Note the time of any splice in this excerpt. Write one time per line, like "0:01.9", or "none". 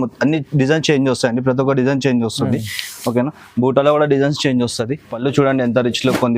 0:05.1